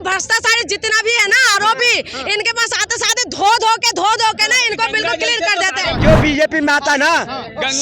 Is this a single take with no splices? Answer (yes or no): no